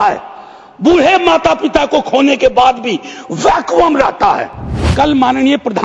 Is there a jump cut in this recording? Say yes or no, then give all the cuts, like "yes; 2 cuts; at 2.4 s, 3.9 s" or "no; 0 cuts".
yes; 1 cut; at 4.8 s